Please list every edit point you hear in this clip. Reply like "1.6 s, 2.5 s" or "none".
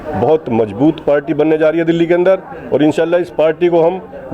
none